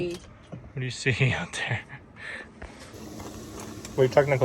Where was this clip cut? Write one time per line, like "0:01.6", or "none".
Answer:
0:02.9